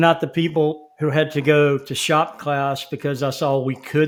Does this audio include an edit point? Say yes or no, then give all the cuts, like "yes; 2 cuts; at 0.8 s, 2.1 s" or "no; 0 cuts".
no; 0 cuts